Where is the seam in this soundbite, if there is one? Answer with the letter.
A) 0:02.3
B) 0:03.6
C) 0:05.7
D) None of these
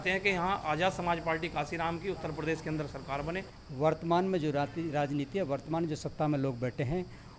B